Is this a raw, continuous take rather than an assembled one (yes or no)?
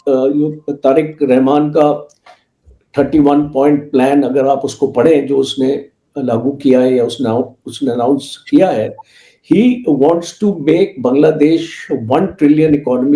yes